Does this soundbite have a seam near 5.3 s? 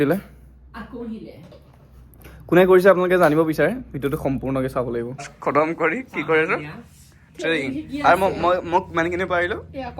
yes; 1 cut; at 5.3 s

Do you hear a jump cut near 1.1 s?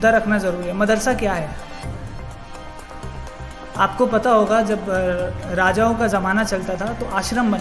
no; 0 cuts

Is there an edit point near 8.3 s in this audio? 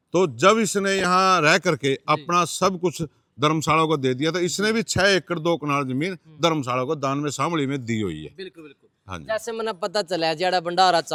no; 0 cuts

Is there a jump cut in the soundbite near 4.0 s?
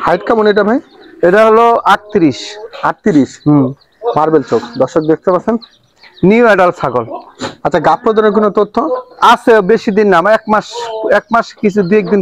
no; 0 cuts

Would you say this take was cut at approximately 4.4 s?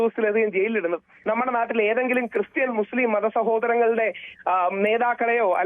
no; 1 cut; at 1.1 s

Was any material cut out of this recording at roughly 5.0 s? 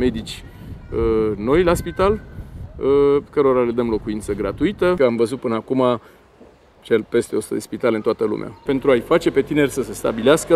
yes; 2 cuts; at 5.0 s, 8.6 s

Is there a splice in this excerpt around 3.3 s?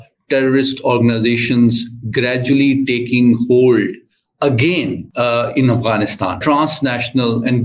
no; 2 cuts; at 5.0 s, 6.4 s

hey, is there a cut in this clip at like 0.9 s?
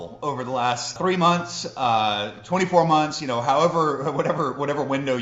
yes; 1 cut; at 0.9 s

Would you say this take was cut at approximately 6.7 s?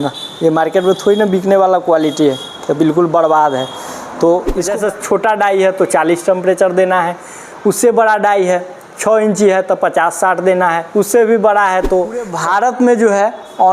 no; 2 cuts; at 4.7 s, 12.3 s

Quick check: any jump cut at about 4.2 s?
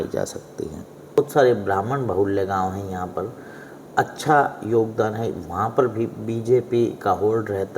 no; 1 cut; at 1.2 s

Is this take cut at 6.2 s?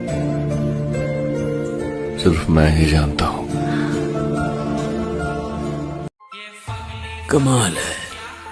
yes; 1 cut; at 6.2 s

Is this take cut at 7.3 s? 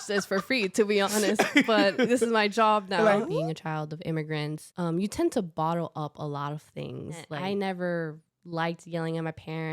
yes; 3 cuts; at 3.3 s, 4.6 s, 7.3 s

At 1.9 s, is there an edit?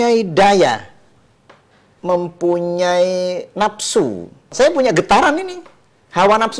yes; 2 cuts; at 1.9 s, 4.5 s

